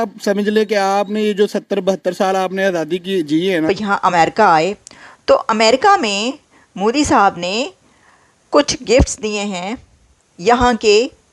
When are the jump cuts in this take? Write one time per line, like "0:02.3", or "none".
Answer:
0:03.7